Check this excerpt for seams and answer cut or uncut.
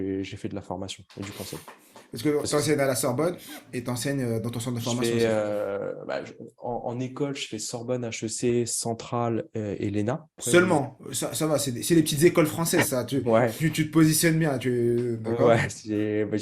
cut